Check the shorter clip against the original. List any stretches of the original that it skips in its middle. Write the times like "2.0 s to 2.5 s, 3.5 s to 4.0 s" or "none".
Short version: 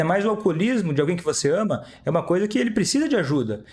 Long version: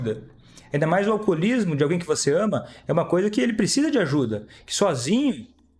none